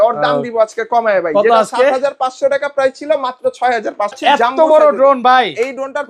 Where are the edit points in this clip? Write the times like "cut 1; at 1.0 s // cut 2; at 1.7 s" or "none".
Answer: cut 1; at 4.2 s